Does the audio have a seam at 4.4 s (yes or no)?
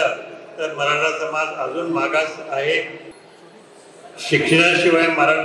no